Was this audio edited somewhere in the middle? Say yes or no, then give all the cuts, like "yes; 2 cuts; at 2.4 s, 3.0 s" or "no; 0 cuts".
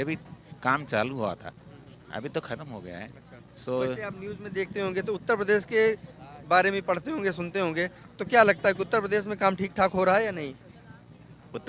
no; 0 cuts